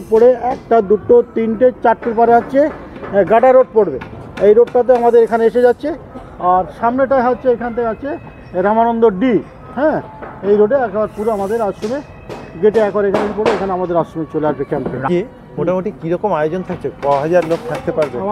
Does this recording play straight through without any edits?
no; 1 cut; at 15.1 s

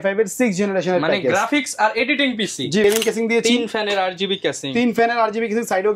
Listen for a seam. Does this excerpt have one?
yes; 1 cut; at 2.8 s

